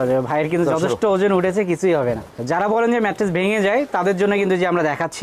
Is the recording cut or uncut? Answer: uncut